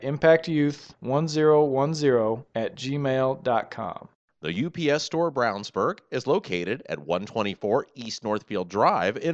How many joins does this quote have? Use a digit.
1